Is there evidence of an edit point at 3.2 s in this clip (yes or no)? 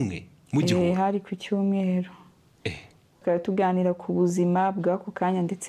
yes